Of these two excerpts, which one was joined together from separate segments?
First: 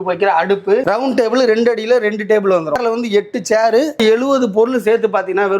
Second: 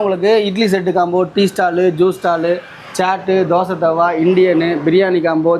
first; 3 cuts; at 1.0 s, 2.8 s, 4.0 s

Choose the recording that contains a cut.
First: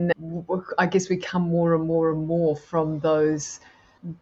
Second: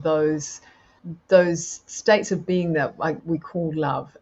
second; 1 cut; at 3.2 s

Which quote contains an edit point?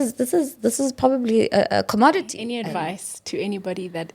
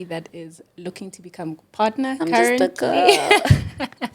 first; 1 cut; at 2.4 s

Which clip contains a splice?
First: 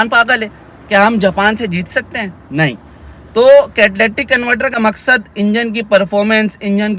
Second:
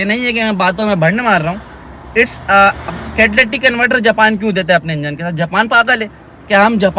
first; 1 cut; at 4.8 s

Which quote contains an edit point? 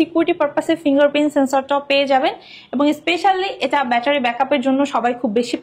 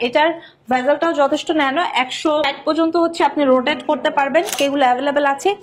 second; 2 cuts; at 2.5 s, 4.6 s

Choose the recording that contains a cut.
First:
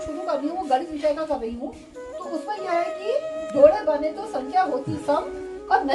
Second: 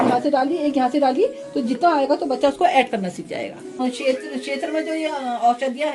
second; 1 cut; at 3.8 s

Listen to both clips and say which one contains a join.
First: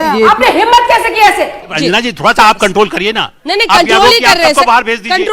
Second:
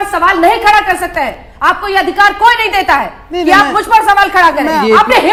first; 1 cut; at 1.7 s

